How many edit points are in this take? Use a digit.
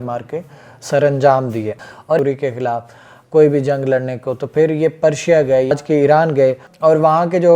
2